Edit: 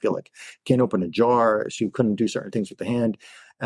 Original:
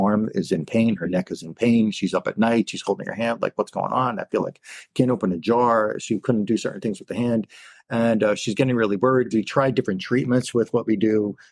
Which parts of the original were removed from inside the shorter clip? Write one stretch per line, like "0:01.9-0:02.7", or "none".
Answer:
none